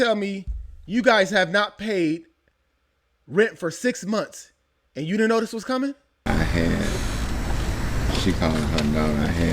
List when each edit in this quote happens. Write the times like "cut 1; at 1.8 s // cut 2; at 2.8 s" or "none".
cut 1; at 6.1 s